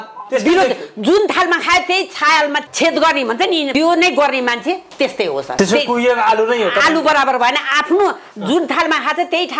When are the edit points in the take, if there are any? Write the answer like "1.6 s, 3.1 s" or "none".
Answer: 2.7 s, 3.7 s, 5.6 s